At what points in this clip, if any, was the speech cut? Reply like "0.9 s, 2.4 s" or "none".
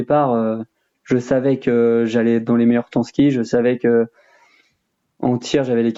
none